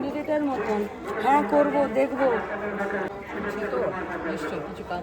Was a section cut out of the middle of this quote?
yes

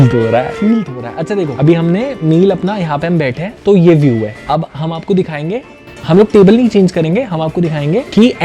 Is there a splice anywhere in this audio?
no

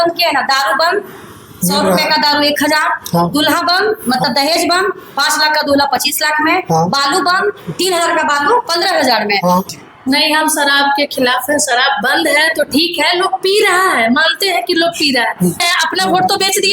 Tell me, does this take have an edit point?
yes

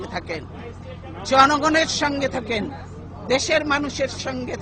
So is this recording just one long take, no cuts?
yes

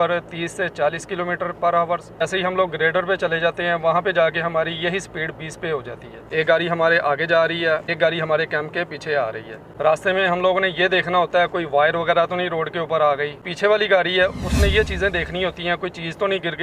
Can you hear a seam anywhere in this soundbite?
yes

